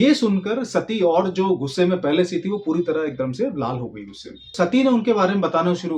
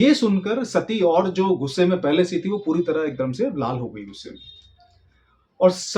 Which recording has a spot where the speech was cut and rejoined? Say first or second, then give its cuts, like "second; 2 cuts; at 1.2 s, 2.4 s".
first; 1 cut; at 4.5 s